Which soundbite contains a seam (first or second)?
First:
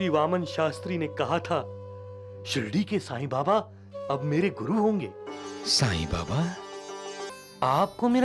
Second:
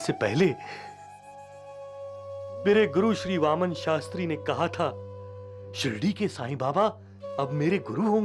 first